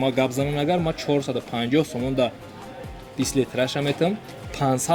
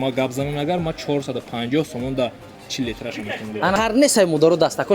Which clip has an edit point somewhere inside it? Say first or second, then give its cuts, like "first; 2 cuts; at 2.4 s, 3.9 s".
second; 2 cuts; at 2.6 s, 3.7 s